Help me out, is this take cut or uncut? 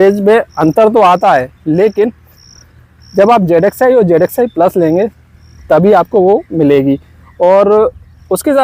uncut